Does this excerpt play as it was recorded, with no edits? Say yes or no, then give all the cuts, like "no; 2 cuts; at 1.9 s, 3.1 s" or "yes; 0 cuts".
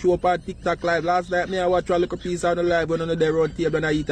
yes; 0 cuts